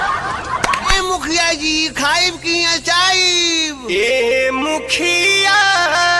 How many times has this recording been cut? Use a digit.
1